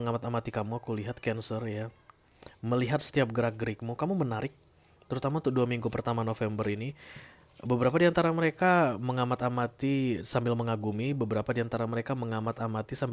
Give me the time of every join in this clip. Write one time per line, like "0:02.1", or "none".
none